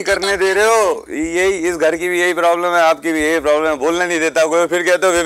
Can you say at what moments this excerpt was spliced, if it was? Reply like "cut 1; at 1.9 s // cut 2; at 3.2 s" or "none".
none